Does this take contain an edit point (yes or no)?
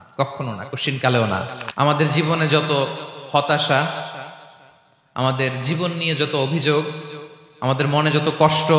yes